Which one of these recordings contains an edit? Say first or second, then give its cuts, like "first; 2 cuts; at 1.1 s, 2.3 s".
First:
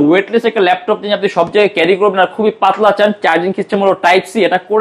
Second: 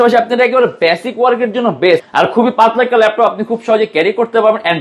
second; 1 cut; at 2.0 s